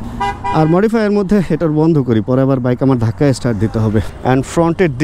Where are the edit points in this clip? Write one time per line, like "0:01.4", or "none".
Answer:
0:04.1